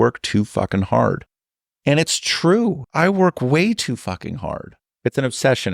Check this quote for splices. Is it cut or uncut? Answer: cut